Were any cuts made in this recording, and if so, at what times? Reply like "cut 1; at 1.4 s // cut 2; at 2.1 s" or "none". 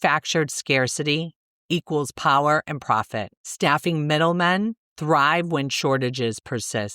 cut 1; at 3.4 s